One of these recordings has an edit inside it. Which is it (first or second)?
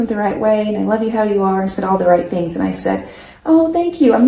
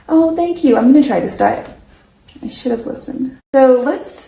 second